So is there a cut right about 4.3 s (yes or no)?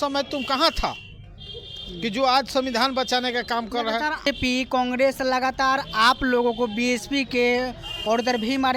yes